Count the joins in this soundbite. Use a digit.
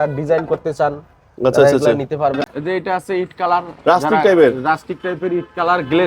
1